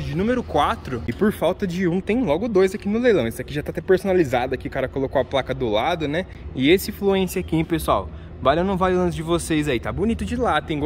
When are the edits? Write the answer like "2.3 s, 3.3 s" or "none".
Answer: 1.1 s, 6.4 s